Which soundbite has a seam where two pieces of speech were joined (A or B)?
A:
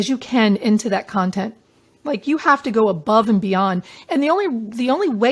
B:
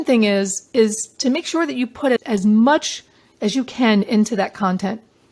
B